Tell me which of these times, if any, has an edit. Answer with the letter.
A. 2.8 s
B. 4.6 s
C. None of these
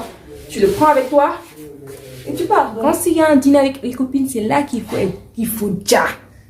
A